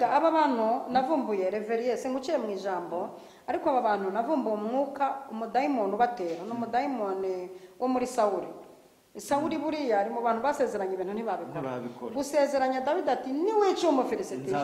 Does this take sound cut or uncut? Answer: uncut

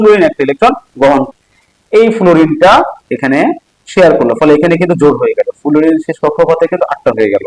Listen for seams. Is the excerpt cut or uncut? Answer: cut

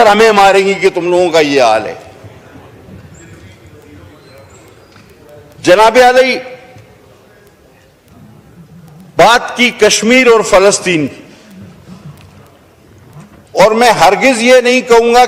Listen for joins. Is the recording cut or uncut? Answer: uncut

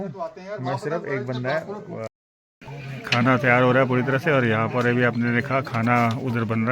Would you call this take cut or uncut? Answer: cut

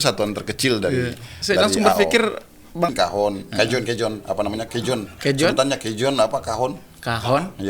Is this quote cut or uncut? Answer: cut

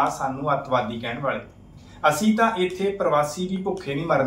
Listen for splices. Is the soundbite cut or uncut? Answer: uncut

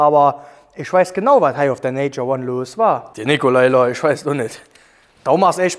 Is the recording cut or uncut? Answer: uncut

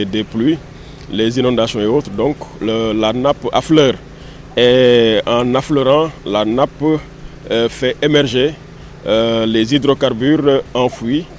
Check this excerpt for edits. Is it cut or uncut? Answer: uncut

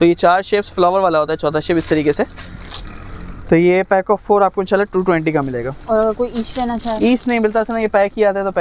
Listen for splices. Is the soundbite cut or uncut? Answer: uncut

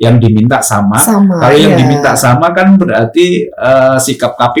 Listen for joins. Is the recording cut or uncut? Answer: uncut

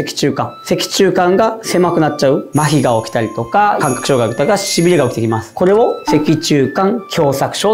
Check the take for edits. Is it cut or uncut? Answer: cut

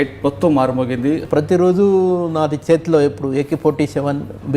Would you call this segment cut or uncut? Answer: cut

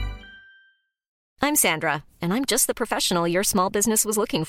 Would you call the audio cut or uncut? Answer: cut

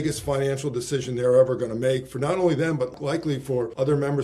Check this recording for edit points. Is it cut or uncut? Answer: cut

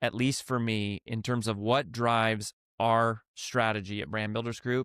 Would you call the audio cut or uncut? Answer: uncut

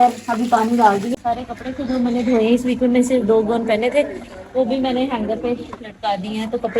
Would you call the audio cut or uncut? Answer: cut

